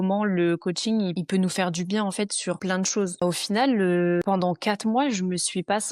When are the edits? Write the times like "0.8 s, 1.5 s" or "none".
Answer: 1.2 s, 2.7 s, 4.2 s